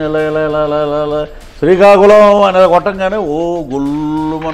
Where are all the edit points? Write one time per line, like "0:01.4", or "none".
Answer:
none